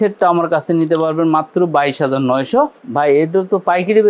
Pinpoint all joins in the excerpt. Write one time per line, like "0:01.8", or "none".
0:02.8

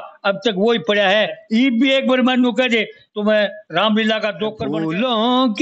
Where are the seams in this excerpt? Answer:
0:04.6

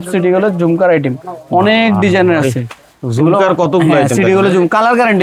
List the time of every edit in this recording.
none

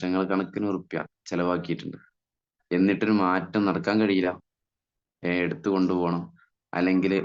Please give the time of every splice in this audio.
none

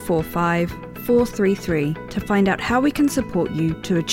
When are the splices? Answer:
none

